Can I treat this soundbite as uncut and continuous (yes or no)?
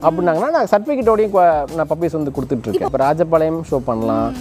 no